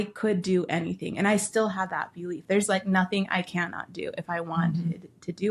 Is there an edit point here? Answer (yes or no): no